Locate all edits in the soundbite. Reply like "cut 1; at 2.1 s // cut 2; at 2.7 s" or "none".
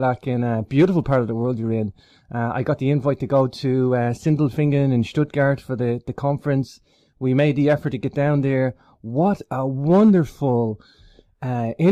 cut 1; at 1.1 s